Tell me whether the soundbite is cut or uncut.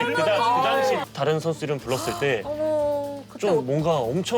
cut